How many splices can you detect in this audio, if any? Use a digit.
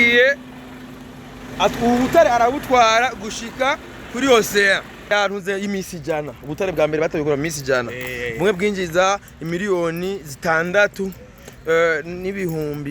1